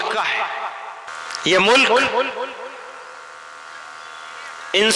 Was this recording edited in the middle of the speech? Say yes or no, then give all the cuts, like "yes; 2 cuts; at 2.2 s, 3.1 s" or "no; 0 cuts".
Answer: yes; 1 cut; at 1.1 s